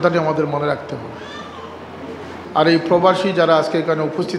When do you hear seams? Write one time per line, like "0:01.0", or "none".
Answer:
0:02.3